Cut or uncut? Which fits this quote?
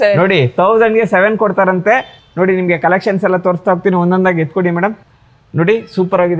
uncut